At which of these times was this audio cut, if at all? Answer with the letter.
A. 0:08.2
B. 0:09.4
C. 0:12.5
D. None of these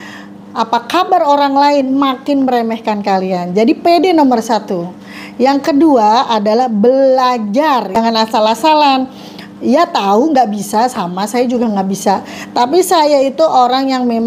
A